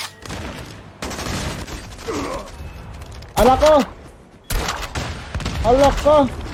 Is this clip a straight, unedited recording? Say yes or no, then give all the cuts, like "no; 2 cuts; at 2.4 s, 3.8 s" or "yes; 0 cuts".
yes; 0 cuts